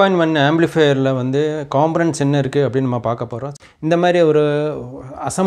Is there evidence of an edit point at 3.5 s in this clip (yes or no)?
yes